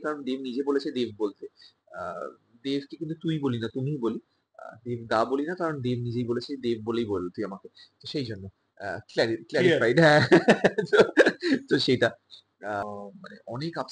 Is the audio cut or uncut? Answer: cut